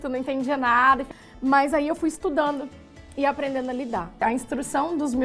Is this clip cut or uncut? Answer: cut